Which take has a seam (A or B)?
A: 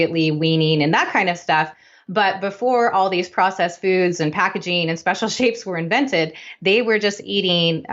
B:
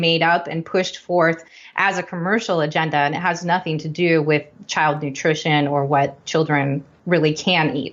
B